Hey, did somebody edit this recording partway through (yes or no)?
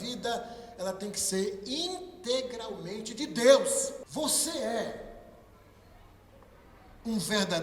yes